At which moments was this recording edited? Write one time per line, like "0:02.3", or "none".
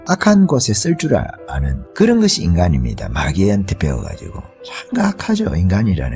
none

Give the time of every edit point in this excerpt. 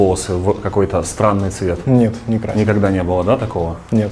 none

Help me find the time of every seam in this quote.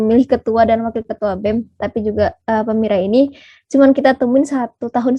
none

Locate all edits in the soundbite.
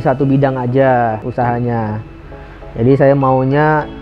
0:01.2

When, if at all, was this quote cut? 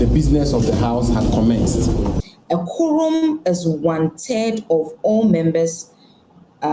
0:02.2

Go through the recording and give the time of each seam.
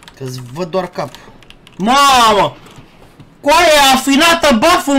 none

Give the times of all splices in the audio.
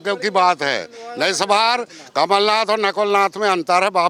none

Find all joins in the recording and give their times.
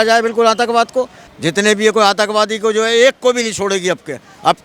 0:01.2

